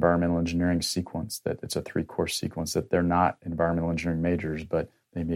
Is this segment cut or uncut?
uncut